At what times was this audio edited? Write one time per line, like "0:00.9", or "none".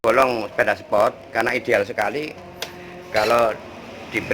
0:03.2